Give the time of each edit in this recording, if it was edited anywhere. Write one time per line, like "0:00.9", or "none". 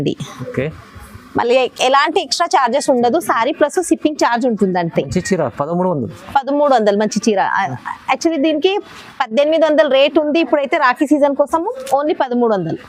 none